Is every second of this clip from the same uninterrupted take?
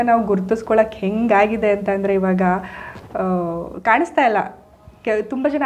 yes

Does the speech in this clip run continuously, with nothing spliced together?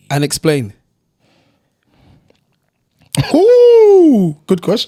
yes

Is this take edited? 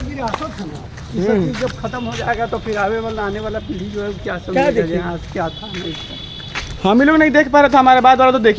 no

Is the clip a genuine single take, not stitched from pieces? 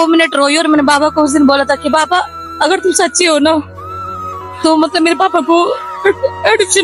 yes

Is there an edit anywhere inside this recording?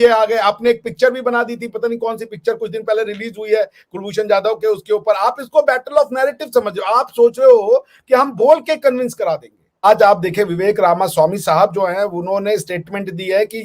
yes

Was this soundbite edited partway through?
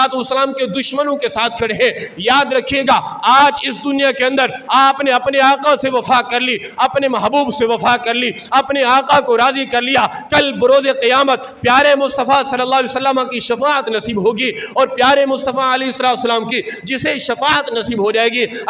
no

